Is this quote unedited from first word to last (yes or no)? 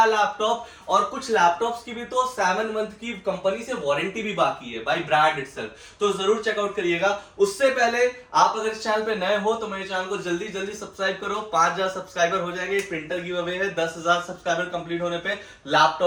yes